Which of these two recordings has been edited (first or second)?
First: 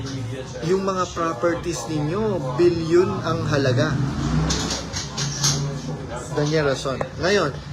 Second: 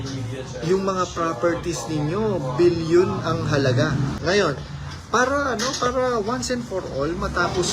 second